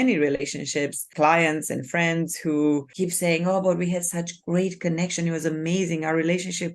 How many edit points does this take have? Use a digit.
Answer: 2